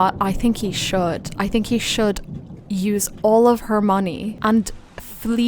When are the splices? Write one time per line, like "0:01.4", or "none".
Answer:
0:04.4

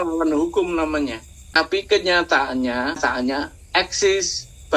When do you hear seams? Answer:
0:01.6
0:03.1

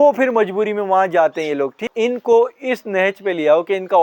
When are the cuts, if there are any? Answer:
0:01.8

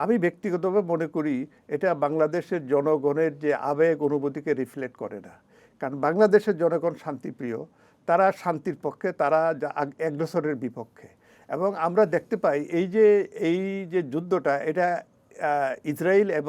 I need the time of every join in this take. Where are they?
none

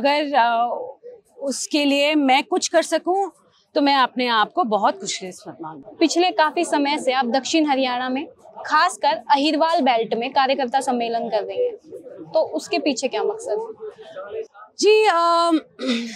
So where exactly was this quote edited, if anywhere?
none

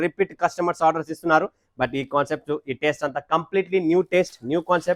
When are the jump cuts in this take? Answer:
none

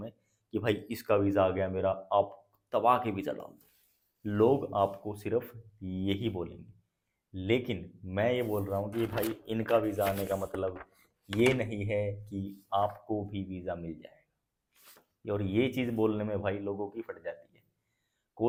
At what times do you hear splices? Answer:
none

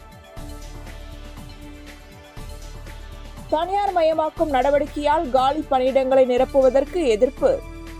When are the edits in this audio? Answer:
0:01.3
0:03.2

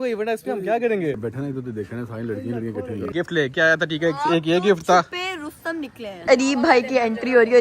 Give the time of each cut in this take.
0:01.2
0:03.1
0:06.2

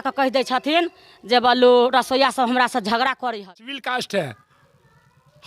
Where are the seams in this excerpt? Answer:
0:03.5

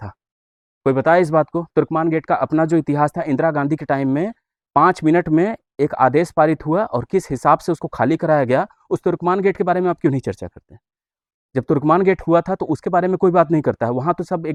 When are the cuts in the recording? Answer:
none

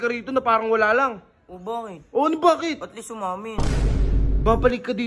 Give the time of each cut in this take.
0:03.9

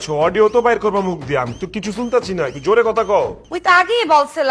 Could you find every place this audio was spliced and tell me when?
0:03.4

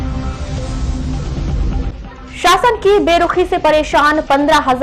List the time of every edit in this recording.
none

